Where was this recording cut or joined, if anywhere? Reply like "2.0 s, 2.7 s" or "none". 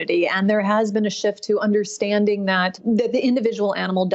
2.8 s